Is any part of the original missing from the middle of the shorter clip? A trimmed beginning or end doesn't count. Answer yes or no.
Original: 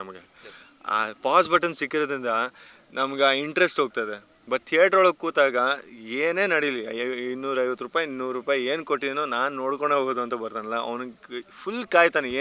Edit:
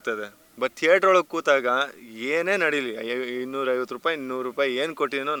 no